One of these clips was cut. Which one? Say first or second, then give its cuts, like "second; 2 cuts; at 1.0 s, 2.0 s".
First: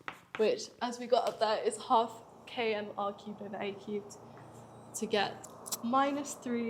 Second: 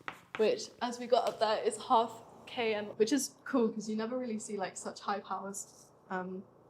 second; 1 cut; at 2.9 s